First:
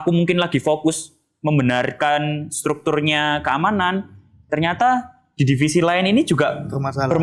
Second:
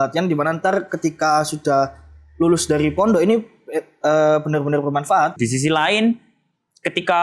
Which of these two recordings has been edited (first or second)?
second